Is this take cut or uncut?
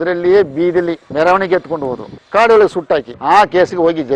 cut